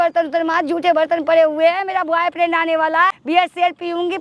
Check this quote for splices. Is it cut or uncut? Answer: cut